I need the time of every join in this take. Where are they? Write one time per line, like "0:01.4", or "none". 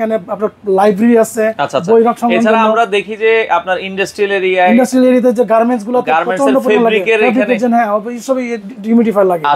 none

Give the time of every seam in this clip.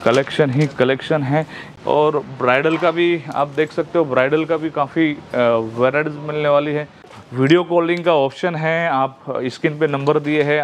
0:01.6
0:07.2

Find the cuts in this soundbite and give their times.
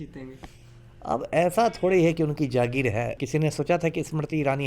0:03.2

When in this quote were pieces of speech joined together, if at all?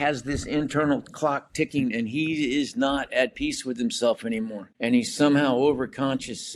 0:04.6

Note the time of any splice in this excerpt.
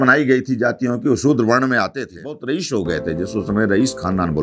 0:02.4

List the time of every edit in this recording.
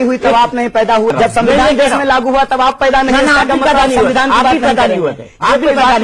0:01.1

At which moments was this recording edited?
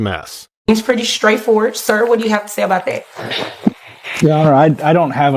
none

